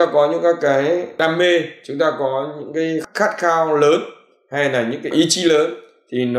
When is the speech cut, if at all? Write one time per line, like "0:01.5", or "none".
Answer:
0:01.2
0:03.0
0:05.1